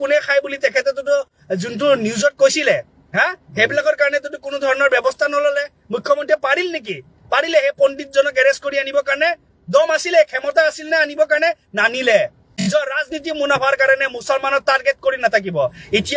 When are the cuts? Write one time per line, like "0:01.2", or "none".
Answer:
0:12.6